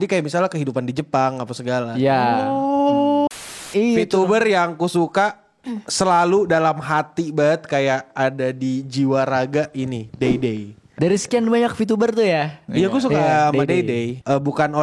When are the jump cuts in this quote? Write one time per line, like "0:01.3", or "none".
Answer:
0:03.3
0:10.9